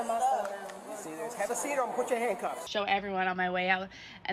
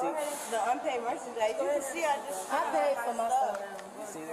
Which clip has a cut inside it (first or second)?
first